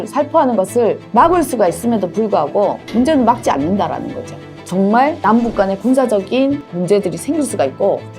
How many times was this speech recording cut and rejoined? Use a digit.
1